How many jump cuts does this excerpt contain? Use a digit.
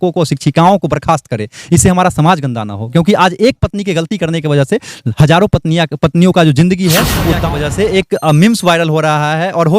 1